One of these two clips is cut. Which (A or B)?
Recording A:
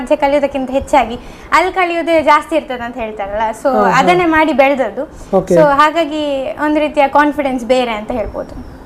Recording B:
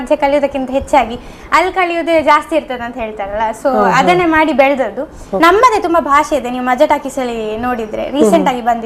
B